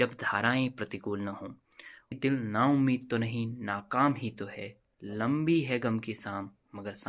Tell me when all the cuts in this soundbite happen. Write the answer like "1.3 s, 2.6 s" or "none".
2.1 s